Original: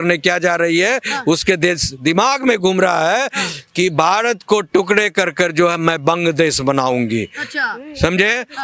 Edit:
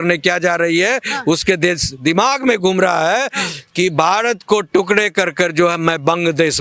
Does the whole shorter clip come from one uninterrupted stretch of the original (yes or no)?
yes